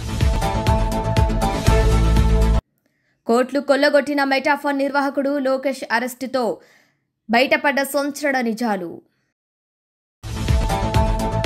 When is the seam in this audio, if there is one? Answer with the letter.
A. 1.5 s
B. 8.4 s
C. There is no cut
C